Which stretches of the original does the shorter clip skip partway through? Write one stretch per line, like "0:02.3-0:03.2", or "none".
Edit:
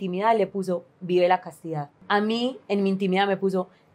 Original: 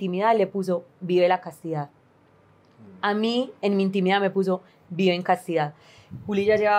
0:01.9-0:02.9